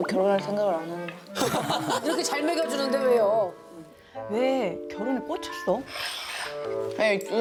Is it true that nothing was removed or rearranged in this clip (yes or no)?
yes